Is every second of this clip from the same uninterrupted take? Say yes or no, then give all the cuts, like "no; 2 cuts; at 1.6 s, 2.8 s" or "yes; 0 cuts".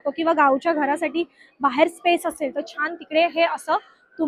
yes; 0 cuts